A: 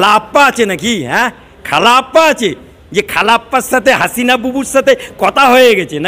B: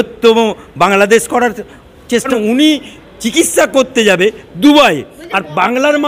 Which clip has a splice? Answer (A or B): B